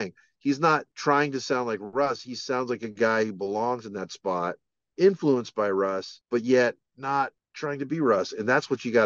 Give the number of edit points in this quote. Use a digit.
3